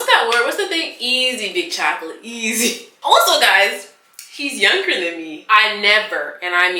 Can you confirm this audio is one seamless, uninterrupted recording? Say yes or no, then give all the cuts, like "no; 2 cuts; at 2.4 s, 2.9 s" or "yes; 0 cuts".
yes; 0 cuts